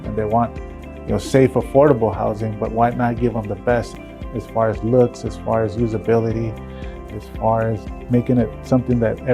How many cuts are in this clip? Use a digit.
3